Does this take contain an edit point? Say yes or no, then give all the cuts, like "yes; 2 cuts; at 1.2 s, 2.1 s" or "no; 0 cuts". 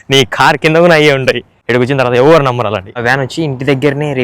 yes; 2 cuts; at 1.5 s, 2.9 s